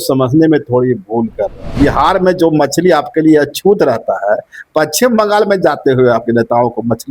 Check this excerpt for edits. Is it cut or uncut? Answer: cut